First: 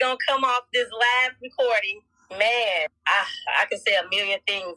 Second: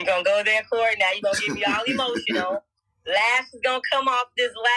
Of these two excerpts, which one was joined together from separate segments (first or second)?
first